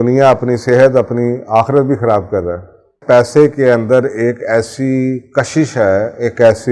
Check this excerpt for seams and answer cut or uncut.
cut